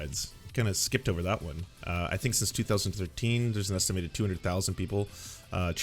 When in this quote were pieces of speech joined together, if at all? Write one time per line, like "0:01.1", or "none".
0:01.6